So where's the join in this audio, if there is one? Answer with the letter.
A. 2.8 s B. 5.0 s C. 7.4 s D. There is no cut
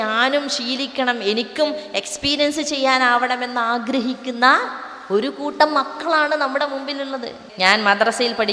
C